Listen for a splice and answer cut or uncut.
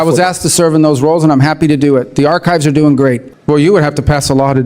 cut